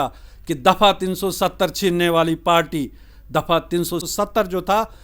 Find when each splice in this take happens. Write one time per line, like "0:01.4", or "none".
0:04.1